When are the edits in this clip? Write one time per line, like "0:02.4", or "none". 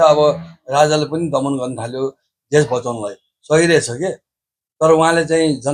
none